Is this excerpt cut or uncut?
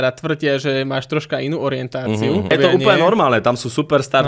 cut